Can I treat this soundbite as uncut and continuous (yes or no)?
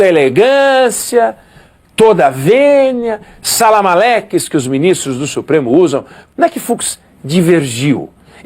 no